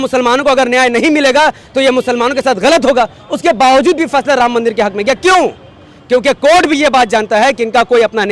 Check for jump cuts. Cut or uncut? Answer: uncut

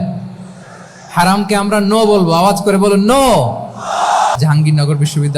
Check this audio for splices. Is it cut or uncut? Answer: cut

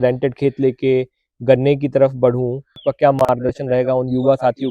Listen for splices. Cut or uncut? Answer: cut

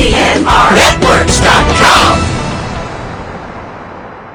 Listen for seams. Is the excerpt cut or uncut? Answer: uncut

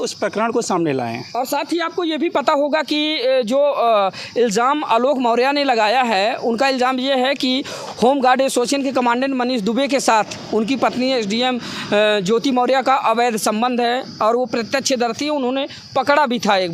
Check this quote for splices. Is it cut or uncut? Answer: uncut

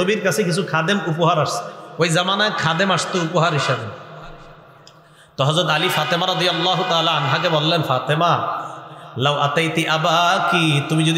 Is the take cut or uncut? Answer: uncut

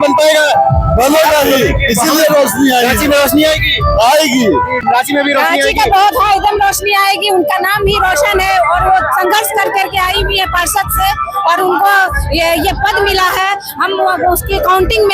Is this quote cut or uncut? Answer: cut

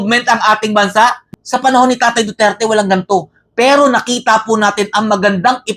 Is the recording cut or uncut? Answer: cut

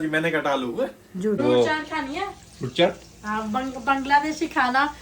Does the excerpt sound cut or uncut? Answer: cut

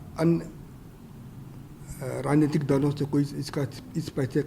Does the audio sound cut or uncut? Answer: uncut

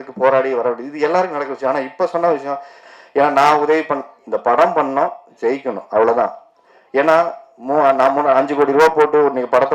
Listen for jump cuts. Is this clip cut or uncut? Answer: cut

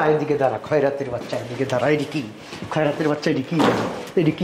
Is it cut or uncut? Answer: uncut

